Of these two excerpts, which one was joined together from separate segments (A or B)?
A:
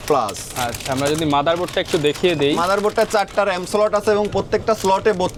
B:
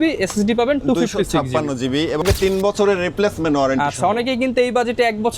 B